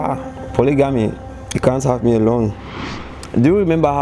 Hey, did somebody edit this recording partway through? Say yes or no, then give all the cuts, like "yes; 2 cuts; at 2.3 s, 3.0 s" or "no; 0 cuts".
yes; 1 cut; at 2.9 s